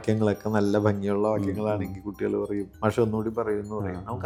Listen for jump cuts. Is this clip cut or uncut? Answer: uncut